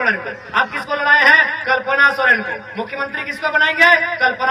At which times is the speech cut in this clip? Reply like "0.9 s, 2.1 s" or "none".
none